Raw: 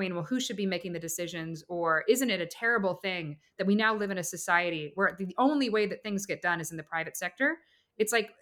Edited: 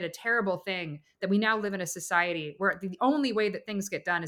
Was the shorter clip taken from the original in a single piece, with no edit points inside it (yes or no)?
yes